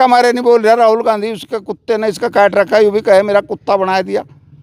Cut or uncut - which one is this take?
uncut